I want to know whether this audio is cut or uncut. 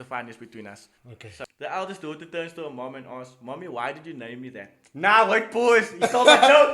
cut